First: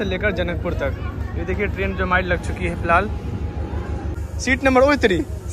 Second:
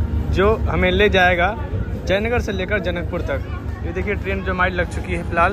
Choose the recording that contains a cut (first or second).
first